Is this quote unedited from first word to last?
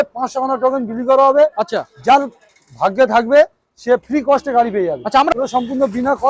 no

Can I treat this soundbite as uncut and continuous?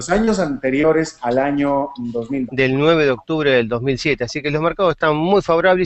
yes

